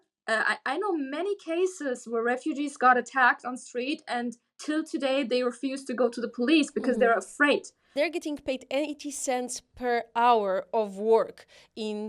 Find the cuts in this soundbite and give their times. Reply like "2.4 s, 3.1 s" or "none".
7.9 s